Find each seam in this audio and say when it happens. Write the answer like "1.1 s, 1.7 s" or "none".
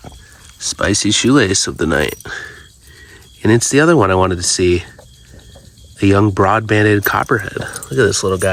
none